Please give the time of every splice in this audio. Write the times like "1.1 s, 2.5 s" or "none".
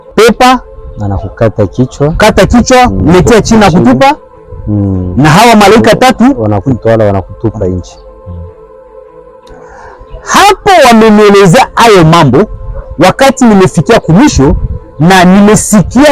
none